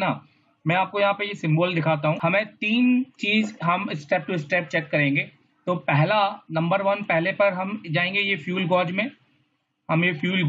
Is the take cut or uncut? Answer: cut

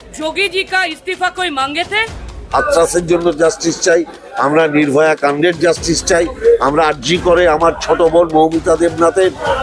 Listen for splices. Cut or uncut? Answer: cut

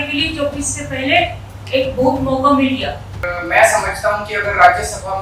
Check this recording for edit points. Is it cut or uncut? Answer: cut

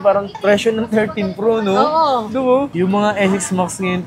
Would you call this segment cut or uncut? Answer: cut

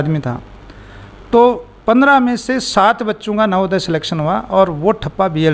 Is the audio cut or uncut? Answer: uncut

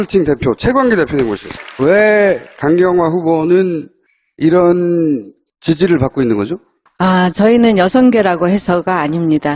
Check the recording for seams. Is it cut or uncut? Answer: cut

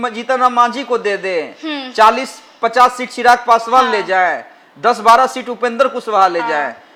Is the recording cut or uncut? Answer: uncut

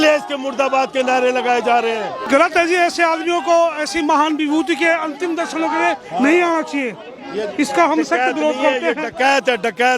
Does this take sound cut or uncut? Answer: cut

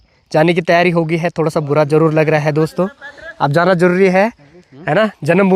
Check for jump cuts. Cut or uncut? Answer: uncut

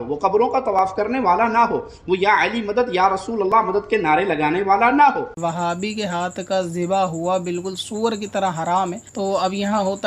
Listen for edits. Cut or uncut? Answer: cut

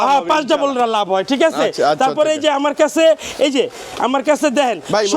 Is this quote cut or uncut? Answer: uncut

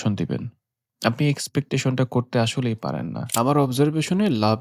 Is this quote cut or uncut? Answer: cut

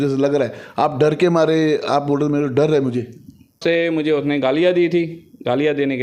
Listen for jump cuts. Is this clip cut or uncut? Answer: cut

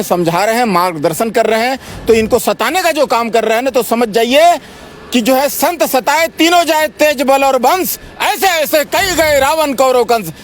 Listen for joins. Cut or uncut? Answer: uncut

